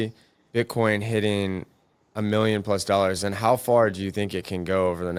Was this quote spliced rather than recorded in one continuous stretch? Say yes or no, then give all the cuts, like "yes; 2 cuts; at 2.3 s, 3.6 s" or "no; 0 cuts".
no; 0 cuts